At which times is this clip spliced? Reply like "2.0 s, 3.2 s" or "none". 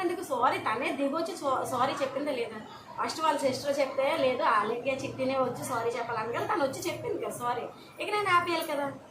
none